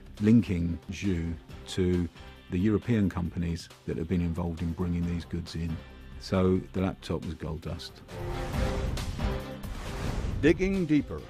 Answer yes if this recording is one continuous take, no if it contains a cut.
yes